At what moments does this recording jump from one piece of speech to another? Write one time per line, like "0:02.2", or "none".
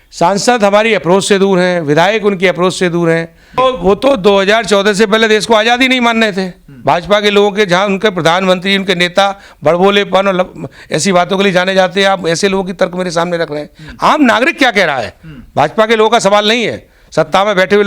0:03.6